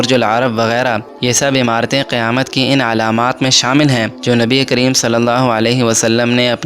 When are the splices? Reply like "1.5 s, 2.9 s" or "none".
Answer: 1.1 s, 4.1 s